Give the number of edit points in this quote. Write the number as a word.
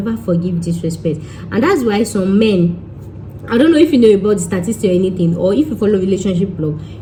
zero